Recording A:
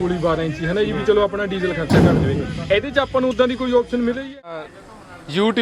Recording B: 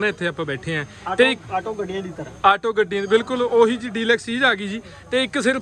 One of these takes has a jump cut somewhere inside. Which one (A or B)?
A